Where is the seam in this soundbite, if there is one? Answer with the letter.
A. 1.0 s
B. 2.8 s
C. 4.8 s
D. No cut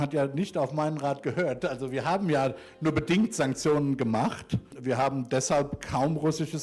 C